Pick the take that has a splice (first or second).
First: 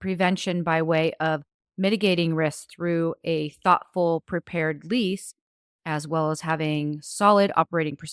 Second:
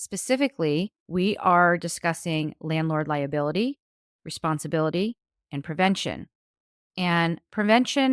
second